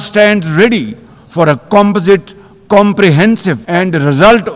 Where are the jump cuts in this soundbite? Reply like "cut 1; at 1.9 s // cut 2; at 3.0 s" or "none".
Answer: cut 1; at 3.6 s